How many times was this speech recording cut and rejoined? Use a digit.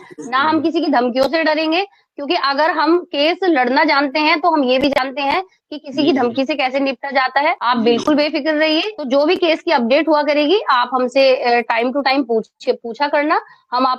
0